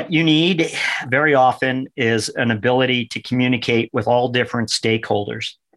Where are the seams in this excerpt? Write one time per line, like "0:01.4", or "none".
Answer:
0:01.0